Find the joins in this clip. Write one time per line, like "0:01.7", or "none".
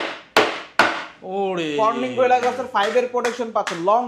none